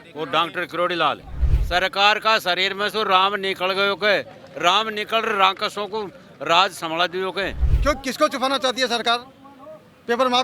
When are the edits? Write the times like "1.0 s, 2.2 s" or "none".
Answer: 1.5 s, 7.6 s